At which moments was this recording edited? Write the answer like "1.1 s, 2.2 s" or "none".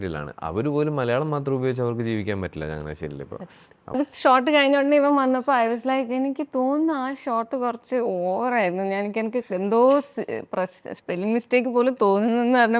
4.0 s